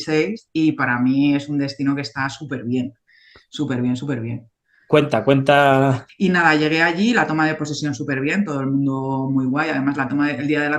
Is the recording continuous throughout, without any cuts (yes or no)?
no